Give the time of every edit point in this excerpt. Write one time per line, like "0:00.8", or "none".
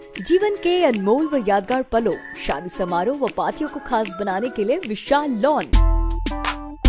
0:05.7